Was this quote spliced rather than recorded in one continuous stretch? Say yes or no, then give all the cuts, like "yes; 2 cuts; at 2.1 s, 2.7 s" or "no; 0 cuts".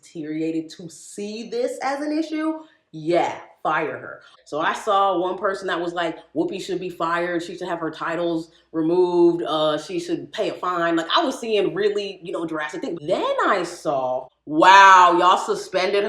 yes; 3 cuts; at 4.4 s, 13.0 s, 14.3 s